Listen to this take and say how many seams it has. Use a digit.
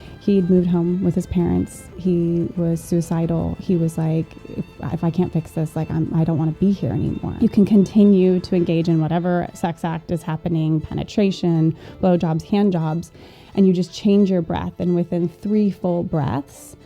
1